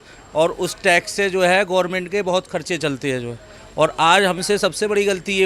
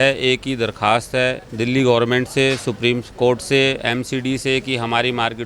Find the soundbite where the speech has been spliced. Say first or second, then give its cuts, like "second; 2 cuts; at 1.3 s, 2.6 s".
second; 1 cut; at 1.5 s